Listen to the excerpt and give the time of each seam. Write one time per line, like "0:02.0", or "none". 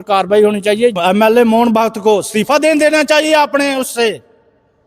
0:01.0